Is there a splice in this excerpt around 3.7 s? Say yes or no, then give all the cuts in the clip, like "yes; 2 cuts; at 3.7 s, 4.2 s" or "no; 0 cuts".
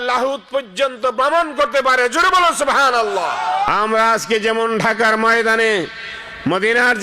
yes; 1 cut; at 3.7 s